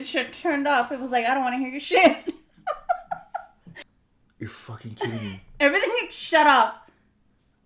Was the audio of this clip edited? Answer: no; 0 cuts

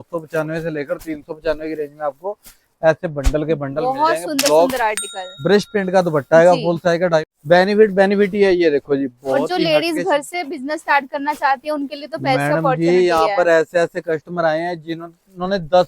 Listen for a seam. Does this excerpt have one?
yes; 1 cut; at 7.3 s

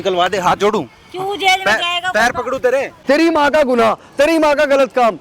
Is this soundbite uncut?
no; 1 cut; at 2.9 s

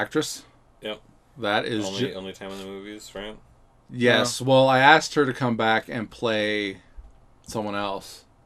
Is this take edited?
no; 0 cuts

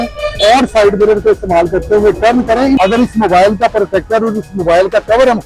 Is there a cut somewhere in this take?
yes; 1 cut; at 2.8 s

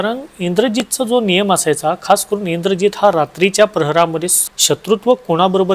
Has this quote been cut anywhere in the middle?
yes; 1 cut; at 4.3 s

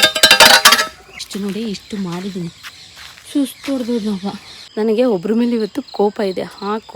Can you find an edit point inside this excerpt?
no; 0 cuts

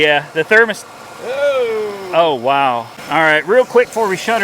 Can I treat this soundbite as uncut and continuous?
no; 1 cut; at 2.9 s

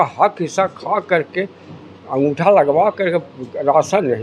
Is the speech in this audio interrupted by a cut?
no; 0 cuts

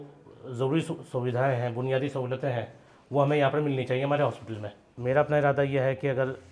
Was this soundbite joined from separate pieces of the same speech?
yes; 1 cut; at 4.9 s

